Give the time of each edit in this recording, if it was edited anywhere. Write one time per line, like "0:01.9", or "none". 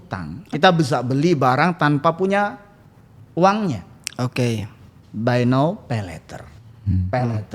none